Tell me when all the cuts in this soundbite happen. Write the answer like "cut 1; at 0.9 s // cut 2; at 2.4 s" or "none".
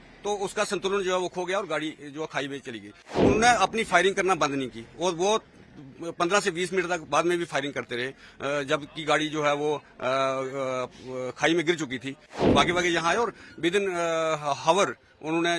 cut 1; at 3.1 s // cut 2; at 12.3 s